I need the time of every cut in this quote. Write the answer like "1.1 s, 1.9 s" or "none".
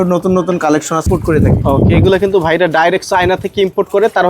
1.1 s